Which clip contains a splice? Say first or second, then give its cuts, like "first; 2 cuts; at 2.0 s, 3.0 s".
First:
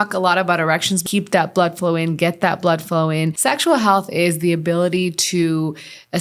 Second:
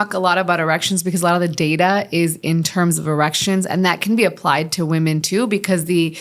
first; 2 cuts; at 1.0 s, 3.3 s